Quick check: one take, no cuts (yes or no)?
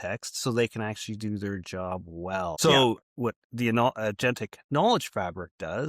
no